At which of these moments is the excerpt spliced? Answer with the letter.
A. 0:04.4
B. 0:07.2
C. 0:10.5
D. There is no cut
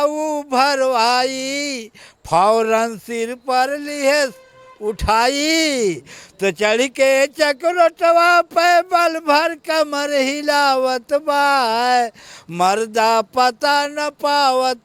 D